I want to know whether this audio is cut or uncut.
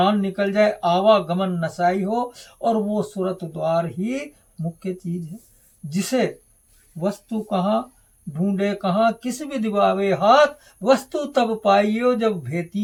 uncut